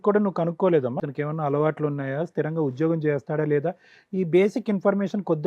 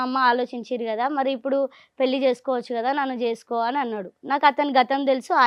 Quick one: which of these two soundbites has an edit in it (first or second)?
first